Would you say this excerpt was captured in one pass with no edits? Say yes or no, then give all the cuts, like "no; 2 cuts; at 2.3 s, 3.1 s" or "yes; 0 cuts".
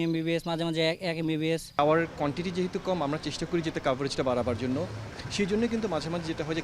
no; 1 cut; at 1.8 s